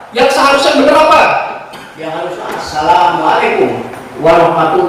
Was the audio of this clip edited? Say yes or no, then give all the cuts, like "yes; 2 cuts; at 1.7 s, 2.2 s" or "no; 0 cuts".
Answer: no; 0 cuts